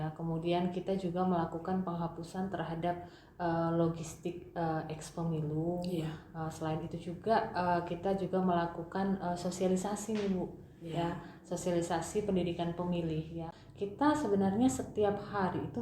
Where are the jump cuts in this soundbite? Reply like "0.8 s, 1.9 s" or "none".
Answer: 13.6 s